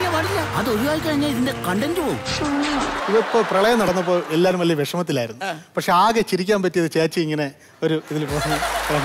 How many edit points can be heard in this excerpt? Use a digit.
1